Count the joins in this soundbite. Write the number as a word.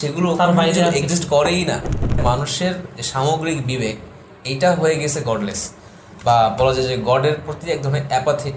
one